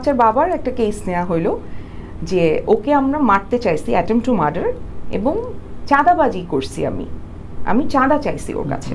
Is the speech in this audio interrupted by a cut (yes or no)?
no